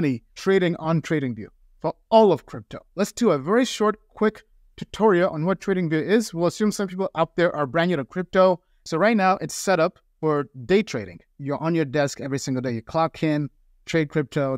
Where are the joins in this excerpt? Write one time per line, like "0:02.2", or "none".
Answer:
0:02.8
0:08.7
0:11.2